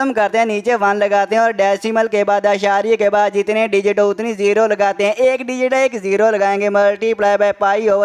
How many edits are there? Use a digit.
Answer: 0